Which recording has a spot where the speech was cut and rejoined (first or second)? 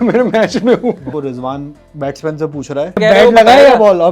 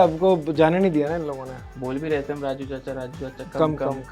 first